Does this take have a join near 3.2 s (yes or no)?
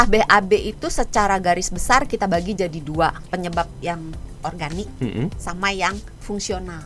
yes